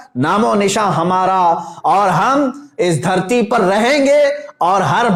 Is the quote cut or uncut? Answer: uncut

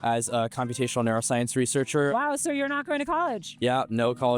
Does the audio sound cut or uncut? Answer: cut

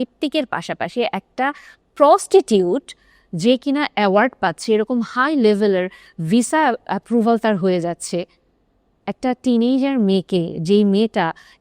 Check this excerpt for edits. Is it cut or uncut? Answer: uncut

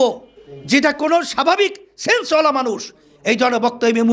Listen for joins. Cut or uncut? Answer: uncut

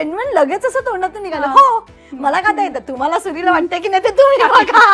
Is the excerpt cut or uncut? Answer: uncut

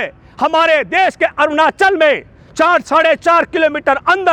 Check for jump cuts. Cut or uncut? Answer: uncut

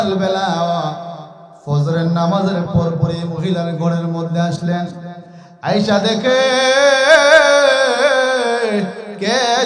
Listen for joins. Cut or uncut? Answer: uncut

